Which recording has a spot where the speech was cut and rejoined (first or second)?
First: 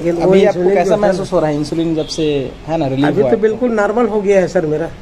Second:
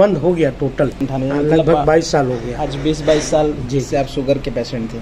second